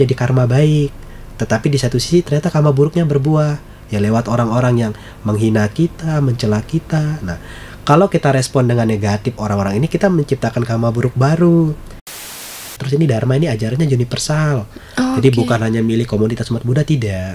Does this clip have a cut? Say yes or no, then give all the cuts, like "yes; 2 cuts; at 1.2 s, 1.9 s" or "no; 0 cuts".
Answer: yes; 1 cut; at 12.2 s